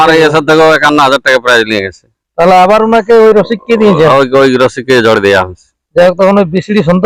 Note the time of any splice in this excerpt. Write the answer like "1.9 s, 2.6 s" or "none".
none

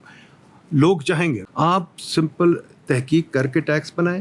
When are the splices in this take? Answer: 1.4 s

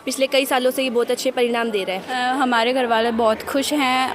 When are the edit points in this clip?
2.0 s

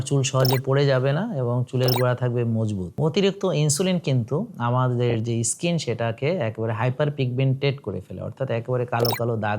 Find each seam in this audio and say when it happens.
3.0 s

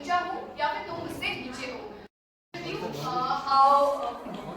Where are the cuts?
2.1 s

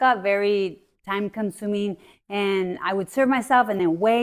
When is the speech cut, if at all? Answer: none

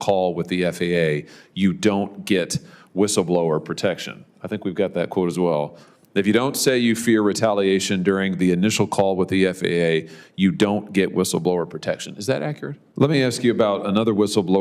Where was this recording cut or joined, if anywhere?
12.7 s

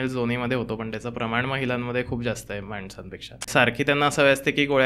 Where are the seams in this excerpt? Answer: 3.5 s

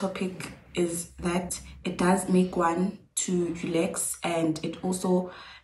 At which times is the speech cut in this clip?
none

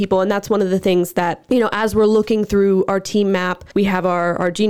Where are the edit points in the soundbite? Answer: 1.4 s, 3.6 s

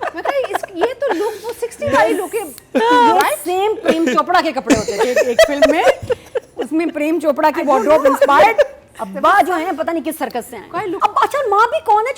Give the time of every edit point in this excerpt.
11.0 s

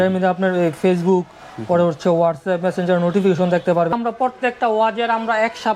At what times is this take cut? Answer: 3.9 s

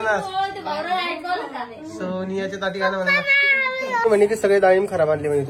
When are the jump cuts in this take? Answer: 4.0 s

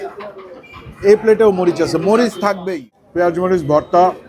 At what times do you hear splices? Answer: 2.6 s

